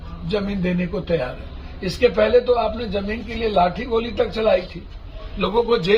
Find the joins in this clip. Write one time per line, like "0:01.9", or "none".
none